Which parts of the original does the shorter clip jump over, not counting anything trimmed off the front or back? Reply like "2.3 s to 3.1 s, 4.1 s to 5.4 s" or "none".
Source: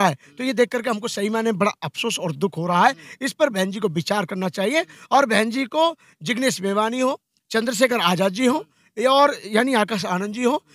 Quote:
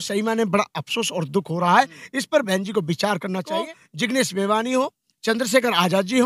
4.7 s to 5.9 s